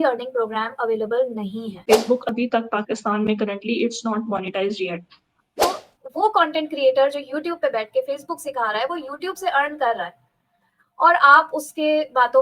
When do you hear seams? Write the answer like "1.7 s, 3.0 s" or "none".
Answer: 1.8 s, 5.5 s

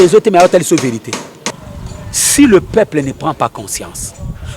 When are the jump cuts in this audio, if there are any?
1.6 s

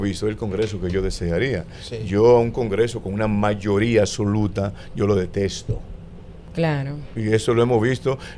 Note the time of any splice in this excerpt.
none

